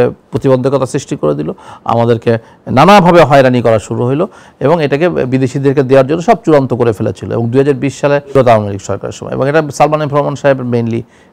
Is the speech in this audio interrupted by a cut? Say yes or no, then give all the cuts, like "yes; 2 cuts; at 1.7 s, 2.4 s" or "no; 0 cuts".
no; 0 cuts